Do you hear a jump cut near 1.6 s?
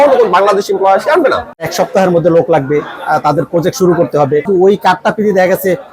yes; 2 cuts; at 1.6 s, 4.5 s

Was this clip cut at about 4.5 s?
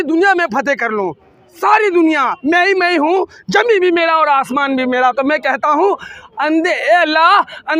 no; 0 cuts

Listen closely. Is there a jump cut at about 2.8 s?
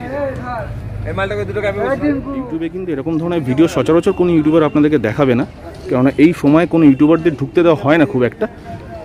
yes; 1 cut; at 2.8 s

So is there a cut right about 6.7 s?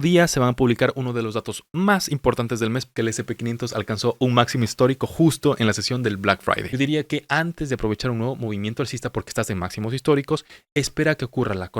yes; 2 cuts; at 2.9 s, 6.7 s

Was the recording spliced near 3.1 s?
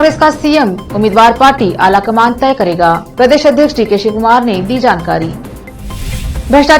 no; 0 cuts

